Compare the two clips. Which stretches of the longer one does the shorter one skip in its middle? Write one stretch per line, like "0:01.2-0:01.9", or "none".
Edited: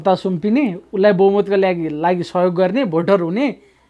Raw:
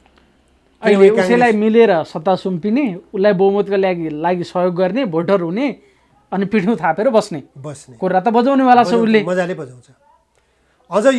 none

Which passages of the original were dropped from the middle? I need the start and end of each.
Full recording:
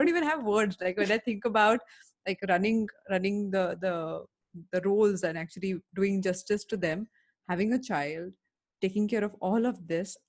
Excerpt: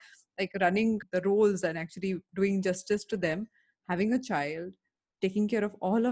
0:02.9-0:04.6

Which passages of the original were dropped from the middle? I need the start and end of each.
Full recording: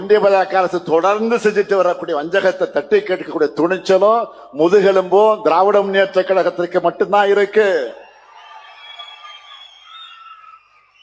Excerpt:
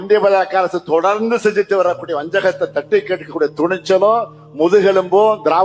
none

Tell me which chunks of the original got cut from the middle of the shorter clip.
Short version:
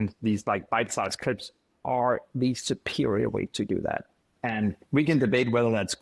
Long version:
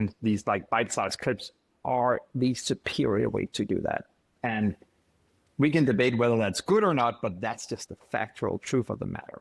0:04.8-0:05.5

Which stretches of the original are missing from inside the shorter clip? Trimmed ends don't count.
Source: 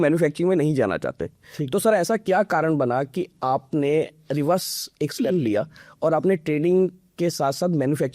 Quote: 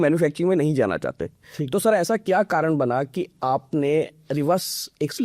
none

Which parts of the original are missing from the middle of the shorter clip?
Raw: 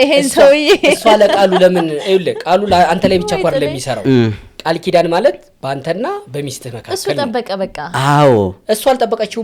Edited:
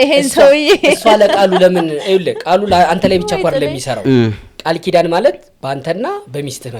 none

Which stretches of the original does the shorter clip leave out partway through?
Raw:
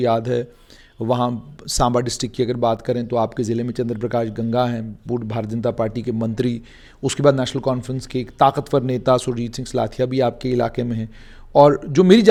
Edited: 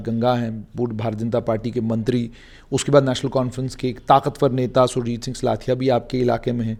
none

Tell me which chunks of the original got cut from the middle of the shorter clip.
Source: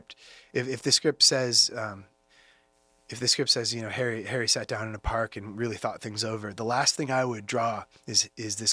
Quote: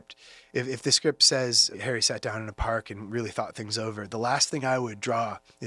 0:01.7-0:04.2

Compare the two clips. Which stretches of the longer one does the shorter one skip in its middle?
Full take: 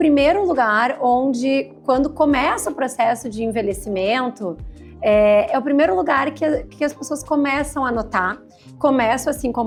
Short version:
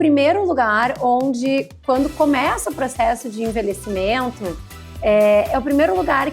none

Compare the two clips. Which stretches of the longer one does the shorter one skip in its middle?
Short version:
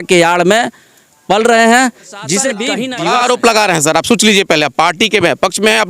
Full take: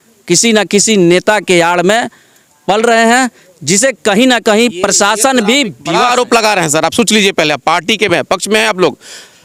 0:04.0-0:05.5

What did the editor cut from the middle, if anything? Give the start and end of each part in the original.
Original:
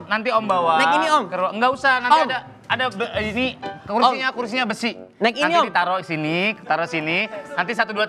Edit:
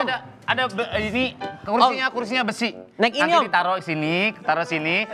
none

